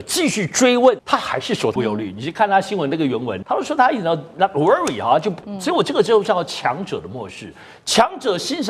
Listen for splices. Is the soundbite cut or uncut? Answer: cut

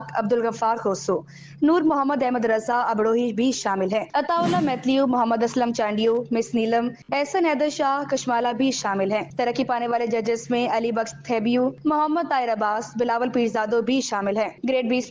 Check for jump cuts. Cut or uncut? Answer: uncut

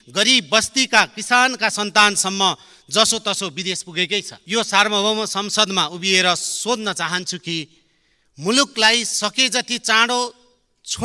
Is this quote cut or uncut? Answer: cut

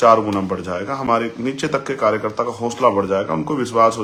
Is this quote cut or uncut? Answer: uncut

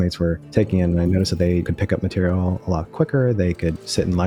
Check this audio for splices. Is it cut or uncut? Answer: uncut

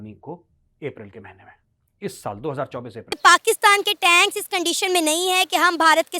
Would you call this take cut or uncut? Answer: cut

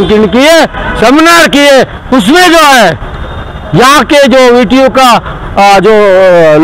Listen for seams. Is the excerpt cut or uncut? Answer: uncut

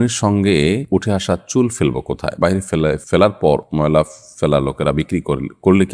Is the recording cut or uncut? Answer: uncut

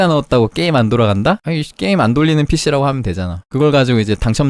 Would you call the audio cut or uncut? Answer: cut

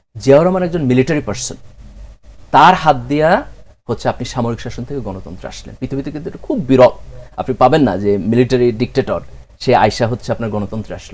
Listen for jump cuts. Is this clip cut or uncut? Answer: uncut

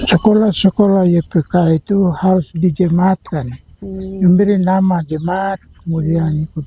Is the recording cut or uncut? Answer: uncut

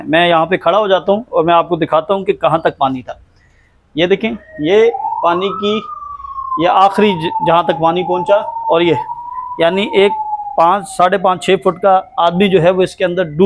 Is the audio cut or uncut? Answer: uncut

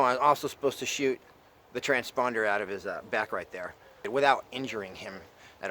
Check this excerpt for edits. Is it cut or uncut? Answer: cut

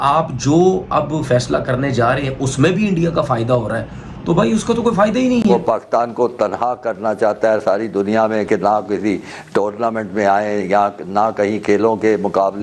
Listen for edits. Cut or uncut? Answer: cut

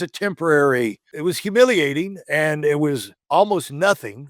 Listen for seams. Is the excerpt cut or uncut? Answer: cut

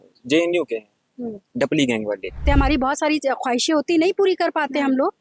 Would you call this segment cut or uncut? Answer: cut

